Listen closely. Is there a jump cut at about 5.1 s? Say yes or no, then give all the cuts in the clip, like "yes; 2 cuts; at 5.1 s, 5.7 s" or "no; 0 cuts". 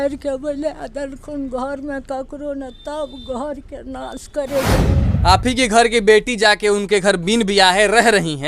yes; 1 cut; at 5.1 s